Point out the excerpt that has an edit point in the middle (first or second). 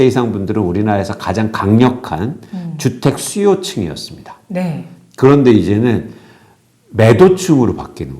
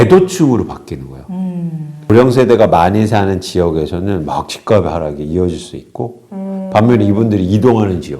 second